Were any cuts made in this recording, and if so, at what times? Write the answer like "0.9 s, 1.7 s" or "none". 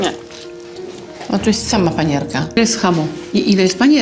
2.6 s